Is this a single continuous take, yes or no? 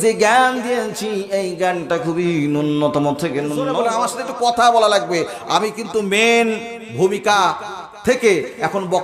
no